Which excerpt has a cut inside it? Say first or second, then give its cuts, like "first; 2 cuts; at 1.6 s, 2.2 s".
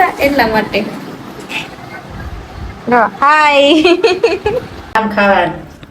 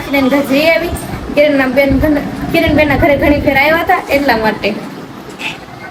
first; 1 cut; at 4.7 s